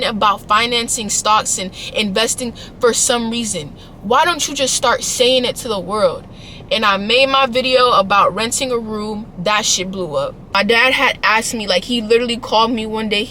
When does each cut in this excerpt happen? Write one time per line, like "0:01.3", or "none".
0:10.4

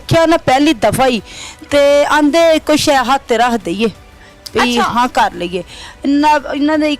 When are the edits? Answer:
none

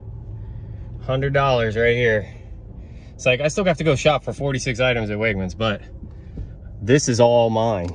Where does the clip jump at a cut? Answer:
none

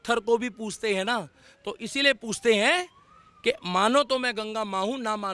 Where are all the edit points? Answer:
none

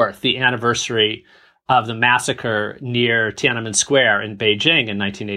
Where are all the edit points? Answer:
none

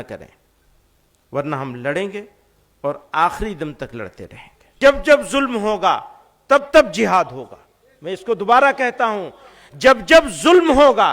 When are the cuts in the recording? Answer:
0:04.8

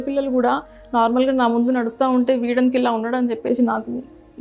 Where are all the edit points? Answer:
none

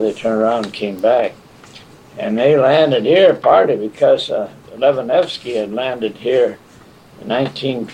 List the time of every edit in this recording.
0:04.6

